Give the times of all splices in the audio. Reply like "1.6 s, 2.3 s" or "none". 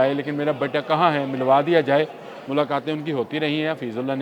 none